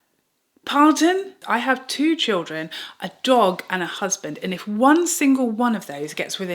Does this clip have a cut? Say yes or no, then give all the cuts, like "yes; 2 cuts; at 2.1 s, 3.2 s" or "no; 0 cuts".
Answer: yes; 1 cut; at 1.3 s